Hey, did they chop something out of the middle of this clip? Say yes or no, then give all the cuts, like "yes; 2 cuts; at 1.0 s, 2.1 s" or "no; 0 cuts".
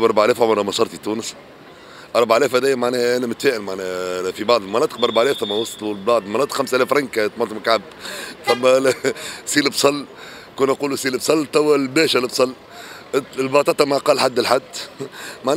no; 0 cuts